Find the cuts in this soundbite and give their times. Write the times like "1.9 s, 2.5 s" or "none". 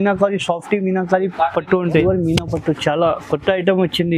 2.0 s